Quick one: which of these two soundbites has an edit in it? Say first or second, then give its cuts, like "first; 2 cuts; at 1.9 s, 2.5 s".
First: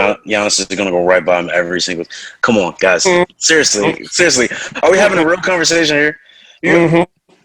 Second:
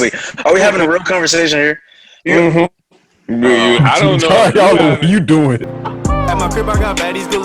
second; 1 cut; at 5.7 s